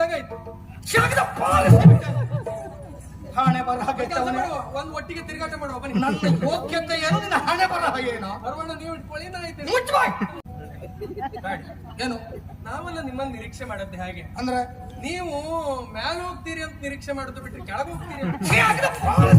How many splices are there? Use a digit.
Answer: 1